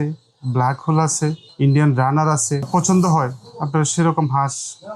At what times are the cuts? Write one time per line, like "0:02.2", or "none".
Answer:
0:01.5
0:02.7